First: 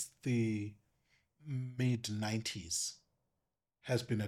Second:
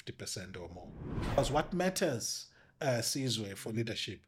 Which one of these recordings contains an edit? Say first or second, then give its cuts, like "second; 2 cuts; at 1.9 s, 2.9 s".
second; 1 cut; at 1.4 s